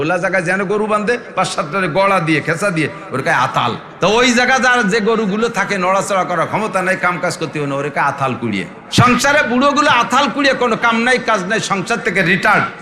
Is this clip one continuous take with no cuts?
no; 2 cuts; at 3.9 s, 8.8 s

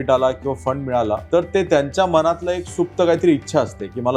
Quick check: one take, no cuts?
no; 1 cut; at 1.2 s

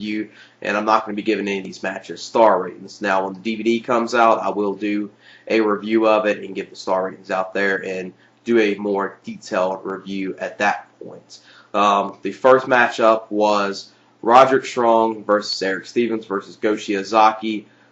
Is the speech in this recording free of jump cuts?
no; 1 cut; at 7.8 s

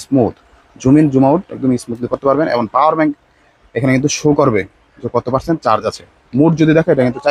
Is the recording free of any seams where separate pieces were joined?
yes; 0 cuts

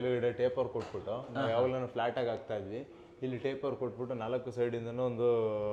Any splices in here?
no; 0 cuts

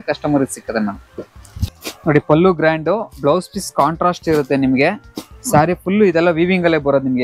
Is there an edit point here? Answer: yes; 1 cut; at 1.6 s

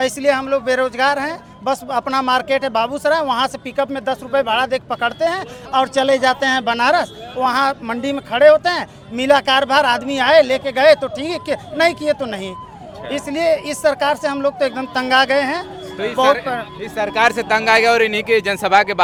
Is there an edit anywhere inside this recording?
no; 0 cuts

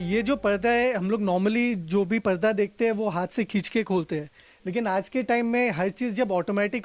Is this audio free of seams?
yes; 0 cuts

